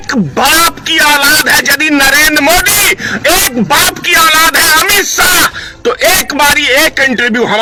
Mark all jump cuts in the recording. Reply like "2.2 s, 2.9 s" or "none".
none